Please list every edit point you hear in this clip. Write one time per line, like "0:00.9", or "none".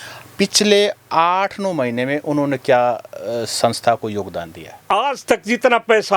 0:04.8